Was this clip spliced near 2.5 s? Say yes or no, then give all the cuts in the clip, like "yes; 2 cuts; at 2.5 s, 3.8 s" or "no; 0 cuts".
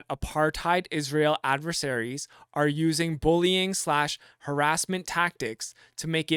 no; 0 cuts